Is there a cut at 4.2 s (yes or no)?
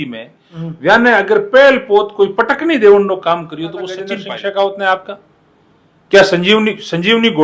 yes